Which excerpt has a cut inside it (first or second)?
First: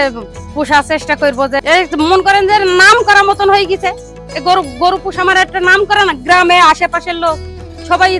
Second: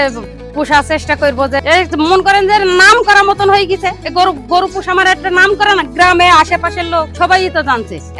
second